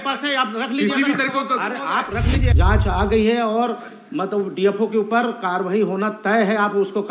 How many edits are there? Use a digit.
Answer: 1